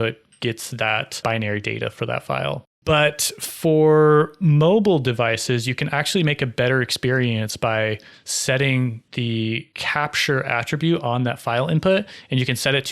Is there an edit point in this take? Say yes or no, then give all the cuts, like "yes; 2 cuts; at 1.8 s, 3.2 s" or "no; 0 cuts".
yes; 3 cuts; at 1.2 s, 2.7 s, 9.3 s